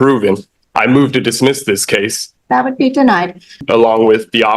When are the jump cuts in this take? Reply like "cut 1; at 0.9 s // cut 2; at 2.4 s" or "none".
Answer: cut 1; at 2.2 s // cut 2; at 3.6 s

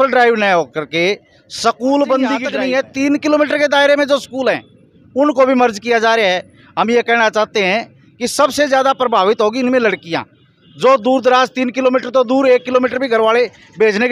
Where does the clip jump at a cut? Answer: cut 1; at 2.5 s

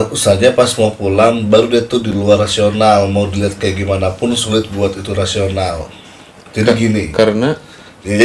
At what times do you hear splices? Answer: none

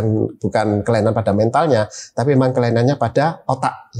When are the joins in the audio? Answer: none

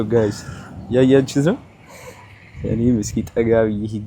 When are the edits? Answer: none

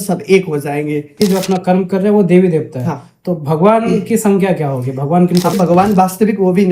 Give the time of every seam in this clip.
cut 1; at 1.2 s // cut 2; at 5.6 s

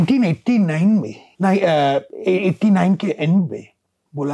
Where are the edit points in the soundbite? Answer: cut 1; at 1.2 s

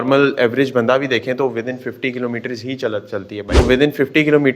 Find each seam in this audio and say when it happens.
cut 1; at 3.6 s

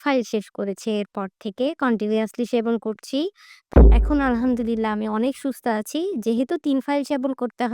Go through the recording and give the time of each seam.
cut 1; at 3.6 s

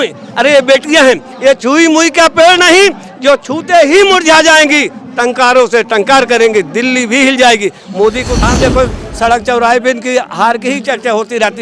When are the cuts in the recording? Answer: cut 1; at 8.5 s

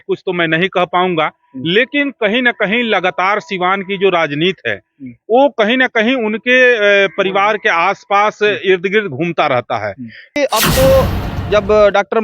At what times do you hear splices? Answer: cut 1; at 10.3 s

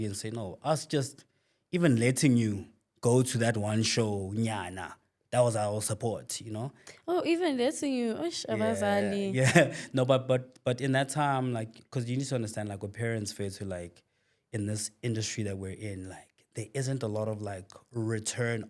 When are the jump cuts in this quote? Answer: none

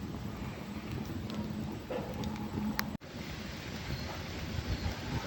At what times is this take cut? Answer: none

